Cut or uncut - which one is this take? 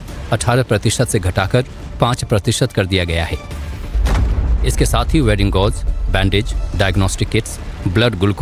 uncut